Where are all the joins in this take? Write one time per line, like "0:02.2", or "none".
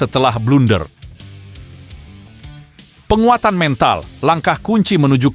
0:00.9
0:03.0